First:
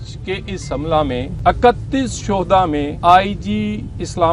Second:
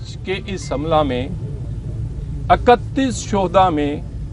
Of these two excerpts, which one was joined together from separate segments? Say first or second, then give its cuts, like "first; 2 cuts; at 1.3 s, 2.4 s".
first; 2 cuts; at 1.3 s, 2.9 s